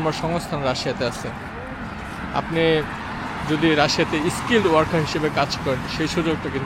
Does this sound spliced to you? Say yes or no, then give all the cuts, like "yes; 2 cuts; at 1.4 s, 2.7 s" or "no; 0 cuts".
no; 0 cuts